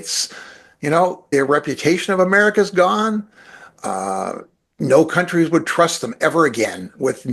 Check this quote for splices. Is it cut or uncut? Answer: cut